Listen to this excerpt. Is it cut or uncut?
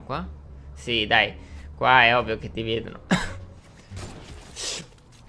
uncut